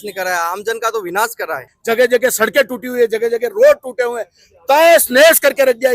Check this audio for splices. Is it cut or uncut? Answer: cut